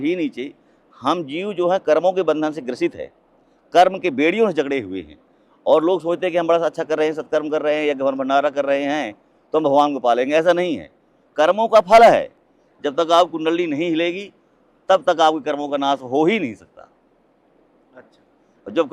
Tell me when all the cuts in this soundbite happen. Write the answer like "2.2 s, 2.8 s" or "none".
12.4 s